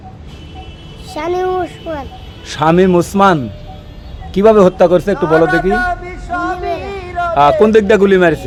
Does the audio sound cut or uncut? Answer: uncut